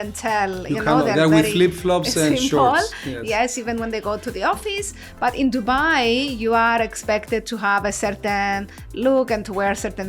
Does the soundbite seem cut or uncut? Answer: uncut